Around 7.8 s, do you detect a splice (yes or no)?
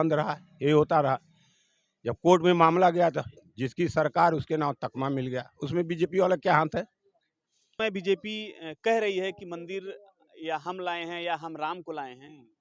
yes